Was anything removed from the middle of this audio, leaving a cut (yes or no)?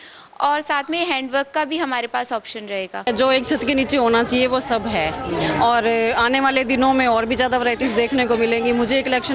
yes